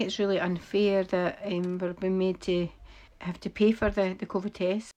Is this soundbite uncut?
yes; 0 cuts

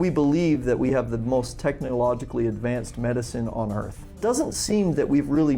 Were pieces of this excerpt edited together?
yes; 1 cut; at 4.2 s

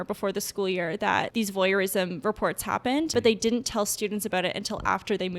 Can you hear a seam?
yes; 2 cuts; at 1.3 s, 3.1 s

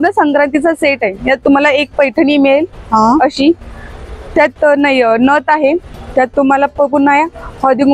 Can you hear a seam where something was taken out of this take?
yes; 1 cut; at 5.9 s

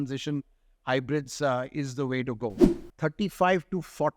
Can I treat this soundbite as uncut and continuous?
no; 1 cut; at 2.6 s

